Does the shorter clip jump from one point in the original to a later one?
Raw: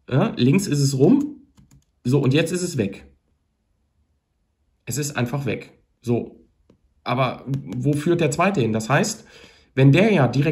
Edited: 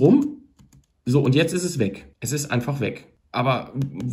yes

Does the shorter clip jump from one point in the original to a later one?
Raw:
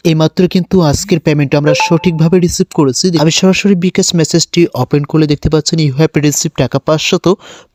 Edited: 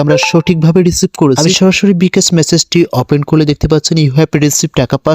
yes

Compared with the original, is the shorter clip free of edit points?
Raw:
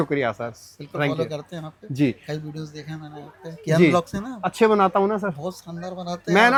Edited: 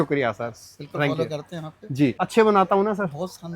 no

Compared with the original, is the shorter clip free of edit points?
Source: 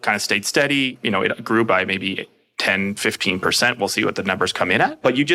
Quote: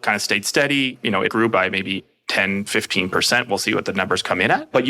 no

